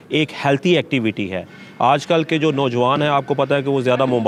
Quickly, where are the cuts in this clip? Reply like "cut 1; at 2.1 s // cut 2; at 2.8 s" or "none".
none